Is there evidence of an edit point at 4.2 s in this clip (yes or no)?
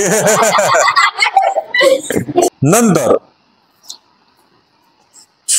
no